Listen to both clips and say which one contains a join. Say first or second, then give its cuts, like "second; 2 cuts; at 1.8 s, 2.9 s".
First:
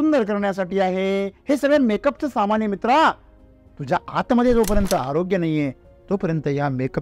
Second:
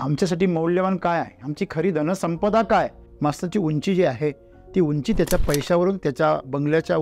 second; 1 cut; at 3.0 s